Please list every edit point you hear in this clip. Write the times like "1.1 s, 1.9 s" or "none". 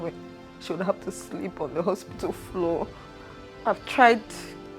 3.6 s